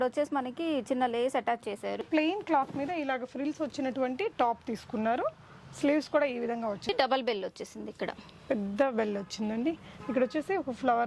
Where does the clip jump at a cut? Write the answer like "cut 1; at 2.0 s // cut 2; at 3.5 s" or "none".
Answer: cut 1; at 2.0 s // cut 2; at 6.9 s